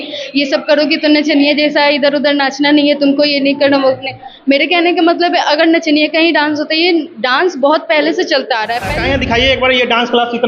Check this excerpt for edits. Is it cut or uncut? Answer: cut